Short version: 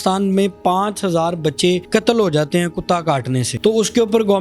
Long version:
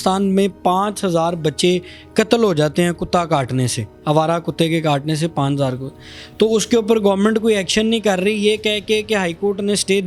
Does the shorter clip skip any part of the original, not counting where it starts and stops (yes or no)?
yes